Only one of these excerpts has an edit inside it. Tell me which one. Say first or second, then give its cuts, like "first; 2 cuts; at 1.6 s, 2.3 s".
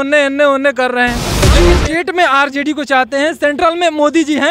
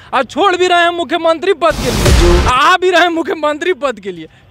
first; 1 cut; at 1.8 s